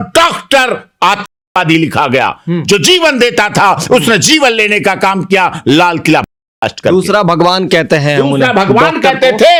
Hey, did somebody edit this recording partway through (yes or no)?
no